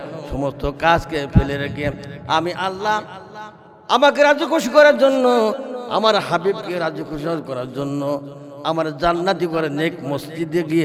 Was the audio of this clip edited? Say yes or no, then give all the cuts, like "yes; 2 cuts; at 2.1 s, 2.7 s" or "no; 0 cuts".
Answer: no; 0 cuts